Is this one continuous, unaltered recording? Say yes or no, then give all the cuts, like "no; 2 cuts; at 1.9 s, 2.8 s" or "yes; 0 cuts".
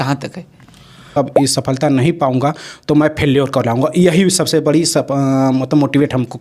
no; 1 cut; at 1.1 s